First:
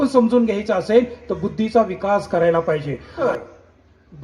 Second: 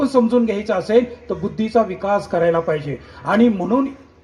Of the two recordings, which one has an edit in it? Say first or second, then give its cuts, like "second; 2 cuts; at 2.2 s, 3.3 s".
first; 1 cut; at 3.2 s